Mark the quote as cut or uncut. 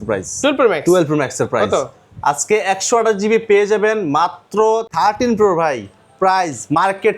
cut